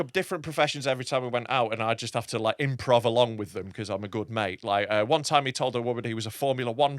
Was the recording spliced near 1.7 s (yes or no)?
no